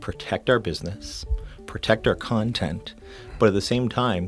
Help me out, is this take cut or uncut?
uncut